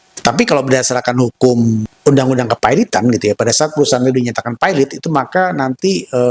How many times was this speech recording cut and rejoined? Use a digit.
1